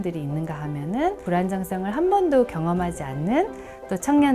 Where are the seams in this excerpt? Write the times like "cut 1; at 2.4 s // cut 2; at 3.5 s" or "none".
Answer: cut 1; at 1.2 s